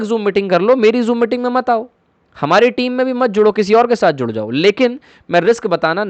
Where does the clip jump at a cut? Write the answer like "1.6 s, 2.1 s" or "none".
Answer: none